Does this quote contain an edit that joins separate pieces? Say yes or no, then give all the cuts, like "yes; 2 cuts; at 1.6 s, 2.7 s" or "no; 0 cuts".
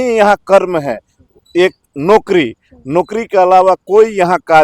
no; 0 cuts